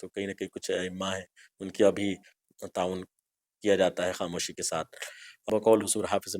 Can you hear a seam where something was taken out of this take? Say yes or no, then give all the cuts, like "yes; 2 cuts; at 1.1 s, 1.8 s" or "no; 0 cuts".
yes; 1 cut; at 5.3 s